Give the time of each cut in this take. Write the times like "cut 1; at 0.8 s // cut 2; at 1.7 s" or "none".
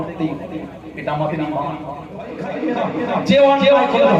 cut 1; at 2.5 s